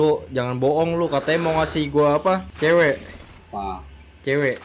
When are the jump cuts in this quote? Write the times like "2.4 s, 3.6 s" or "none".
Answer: none